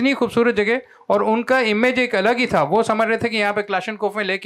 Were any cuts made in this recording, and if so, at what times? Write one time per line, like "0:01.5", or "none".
none